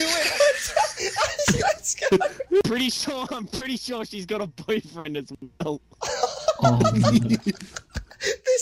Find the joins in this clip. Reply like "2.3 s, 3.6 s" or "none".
2.6 s